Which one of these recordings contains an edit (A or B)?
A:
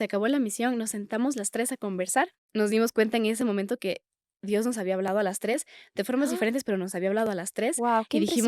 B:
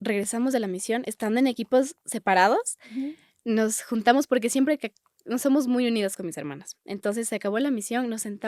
A